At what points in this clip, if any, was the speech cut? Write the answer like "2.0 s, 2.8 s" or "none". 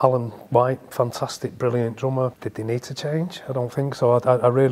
2.4 s

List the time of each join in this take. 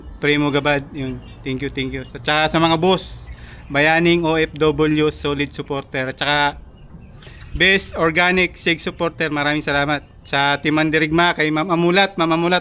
none

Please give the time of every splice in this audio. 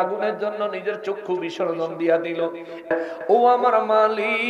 2.9 s

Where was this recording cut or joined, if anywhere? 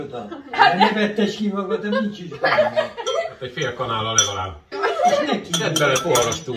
4.6 s

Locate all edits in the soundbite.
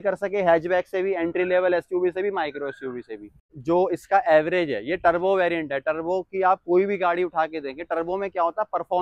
3.5 s

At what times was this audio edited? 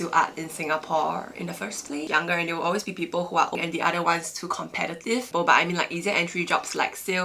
2.1 s, 3.5 s, 5.3 s

